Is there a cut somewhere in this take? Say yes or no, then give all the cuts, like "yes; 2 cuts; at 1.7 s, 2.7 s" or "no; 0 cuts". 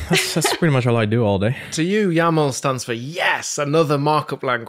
yes; 1 cut; at 1.7 s